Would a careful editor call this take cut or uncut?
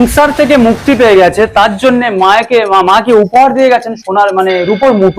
uncut